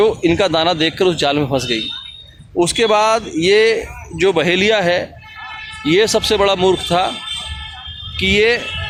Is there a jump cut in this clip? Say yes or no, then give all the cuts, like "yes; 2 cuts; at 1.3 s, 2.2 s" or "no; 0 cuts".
no; 0 cuts